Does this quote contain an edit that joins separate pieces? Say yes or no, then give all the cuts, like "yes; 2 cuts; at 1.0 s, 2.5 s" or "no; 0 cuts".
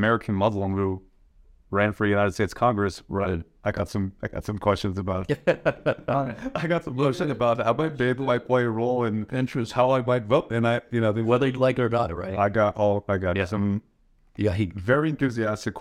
no; 0 cuts